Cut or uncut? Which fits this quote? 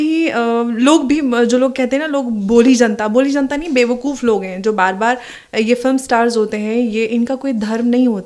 uncut